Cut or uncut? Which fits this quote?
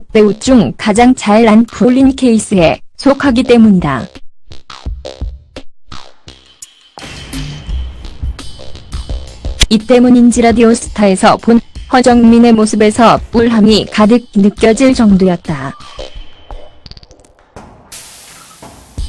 uncut